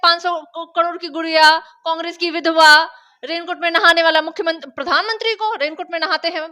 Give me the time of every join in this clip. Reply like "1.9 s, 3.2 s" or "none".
none

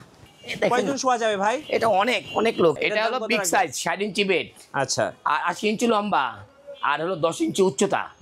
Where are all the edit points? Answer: 2.8 s

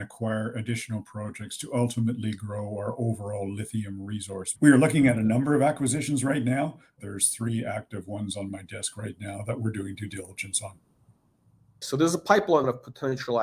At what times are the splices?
4.4 s, 7.0 s, 11.8 s, 12.6 s

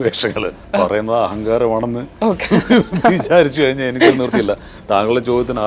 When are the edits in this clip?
none

